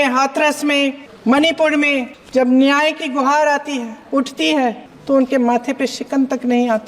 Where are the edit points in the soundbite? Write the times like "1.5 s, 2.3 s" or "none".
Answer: 1.1 s, 2.2 s, 4.0 s, 4.9 s